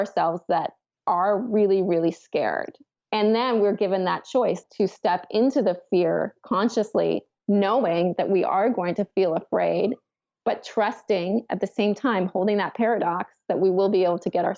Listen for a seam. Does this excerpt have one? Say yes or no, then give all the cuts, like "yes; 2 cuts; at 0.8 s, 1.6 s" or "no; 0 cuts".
yes; 1 cut; at 4.6 s